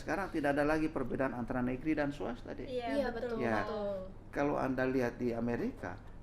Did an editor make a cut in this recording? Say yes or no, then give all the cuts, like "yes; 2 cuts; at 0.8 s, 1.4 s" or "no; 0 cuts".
no; 0 cuts